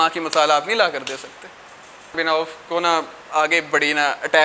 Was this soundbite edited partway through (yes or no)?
yes